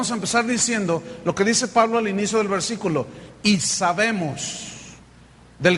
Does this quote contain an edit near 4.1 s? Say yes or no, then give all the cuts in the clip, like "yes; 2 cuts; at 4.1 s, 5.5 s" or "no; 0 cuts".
no; 1 cut; at 1.4 s